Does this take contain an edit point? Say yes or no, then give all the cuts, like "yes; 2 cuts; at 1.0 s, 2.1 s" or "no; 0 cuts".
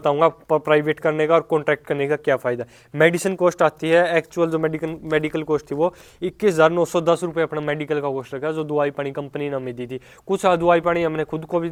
no; 0 cuts